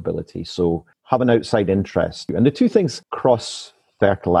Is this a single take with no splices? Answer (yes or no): no